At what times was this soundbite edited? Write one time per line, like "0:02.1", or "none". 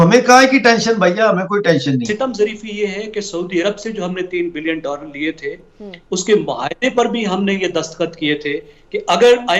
0:02.1